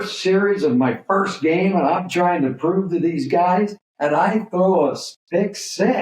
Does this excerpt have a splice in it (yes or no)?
yes